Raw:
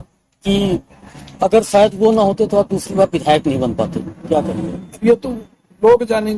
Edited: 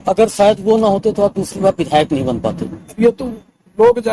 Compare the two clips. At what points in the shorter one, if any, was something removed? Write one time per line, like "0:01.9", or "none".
0:02.8